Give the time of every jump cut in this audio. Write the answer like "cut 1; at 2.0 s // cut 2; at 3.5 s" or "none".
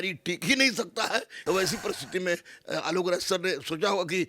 cut 1; at 1.3 s